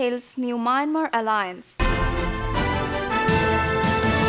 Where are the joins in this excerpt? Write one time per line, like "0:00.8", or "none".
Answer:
none